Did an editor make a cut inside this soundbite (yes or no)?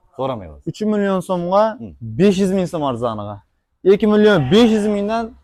no